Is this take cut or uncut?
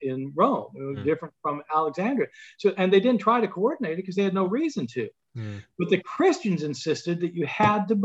uncut